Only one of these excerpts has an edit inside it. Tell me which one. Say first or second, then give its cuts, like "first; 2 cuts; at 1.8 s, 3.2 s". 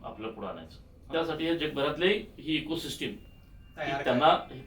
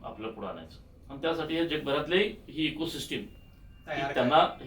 first; 1 cut; at 0.9 s